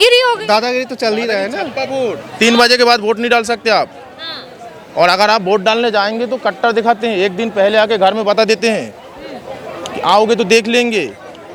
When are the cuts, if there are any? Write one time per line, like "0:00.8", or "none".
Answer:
none